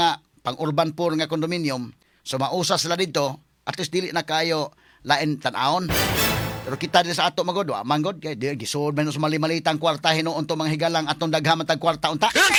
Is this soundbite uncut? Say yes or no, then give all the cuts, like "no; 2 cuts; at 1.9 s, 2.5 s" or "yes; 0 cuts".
yes; 0 cuts